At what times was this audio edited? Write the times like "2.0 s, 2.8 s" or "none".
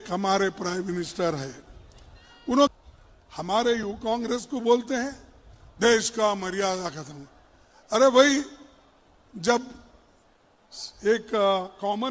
2.7 s